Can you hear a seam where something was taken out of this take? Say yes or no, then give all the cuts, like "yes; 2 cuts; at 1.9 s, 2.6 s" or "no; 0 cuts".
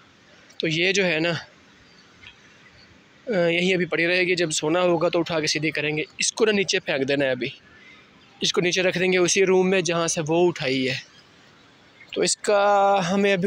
no; 0 cuts